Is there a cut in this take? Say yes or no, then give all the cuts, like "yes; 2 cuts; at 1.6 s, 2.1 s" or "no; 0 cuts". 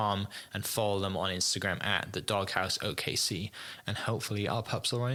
no; 0 cuts